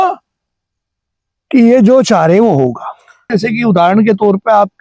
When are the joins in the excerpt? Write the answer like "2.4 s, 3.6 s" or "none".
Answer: 3.3 s